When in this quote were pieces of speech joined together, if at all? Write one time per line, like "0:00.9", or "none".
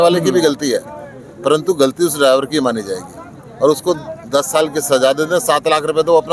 none